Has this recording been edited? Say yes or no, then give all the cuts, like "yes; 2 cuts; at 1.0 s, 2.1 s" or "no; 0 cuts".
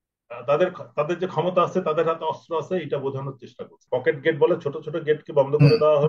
yes; 1 cut; at 3.8 s